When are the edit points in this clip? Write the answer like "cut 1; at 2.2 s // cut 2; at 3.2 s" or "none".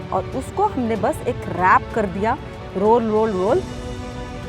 none